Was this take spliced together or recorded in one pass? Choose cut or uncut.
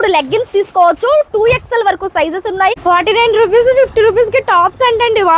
cut